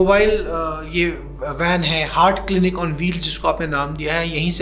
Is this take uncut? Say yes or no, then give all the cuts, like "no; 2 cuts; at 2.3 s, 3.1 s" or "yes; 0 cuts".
yes; 0 cuts